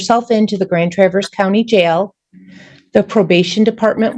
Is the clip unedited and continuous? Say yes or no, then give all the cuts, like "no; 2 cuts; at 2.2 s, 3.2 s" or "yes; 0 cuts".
yes; 0 cuts